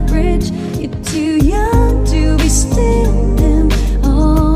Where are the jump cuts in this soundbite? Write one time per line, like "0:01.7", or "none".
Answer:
0:01.4